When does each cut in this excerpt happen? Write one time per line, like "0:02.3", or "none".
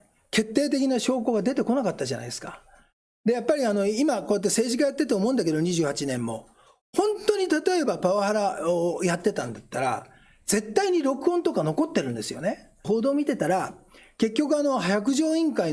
0:12.9